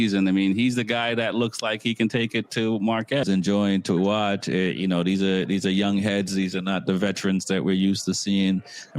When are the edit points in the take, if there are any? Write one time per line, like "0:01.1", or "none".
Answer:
0:03.2